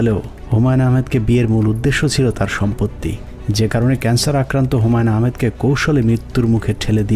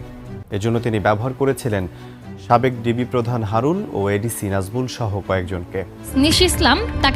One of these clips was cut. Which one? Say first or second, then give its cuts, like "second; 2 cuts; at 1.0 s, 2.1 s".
second; 1 cut; at 6.0 s